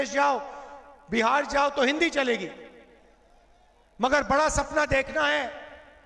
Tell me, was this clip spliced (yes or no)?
no